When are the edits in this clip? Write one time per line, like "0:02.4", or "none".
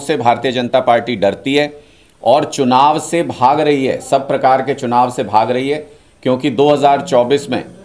none

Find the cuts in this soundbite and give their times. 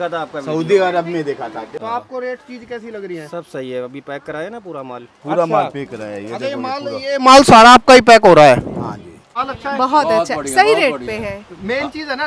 0:01.7
0:09.3

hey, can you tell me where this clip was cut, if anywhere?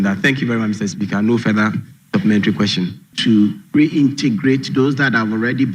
0:03.0

